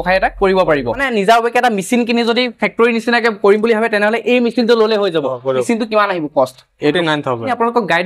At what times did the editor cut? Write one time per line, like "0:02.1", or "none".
0:01.0
0:05.6
0:06.9